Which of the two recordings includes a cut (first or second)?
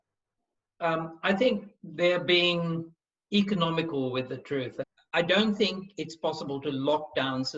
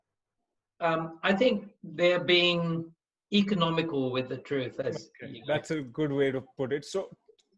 first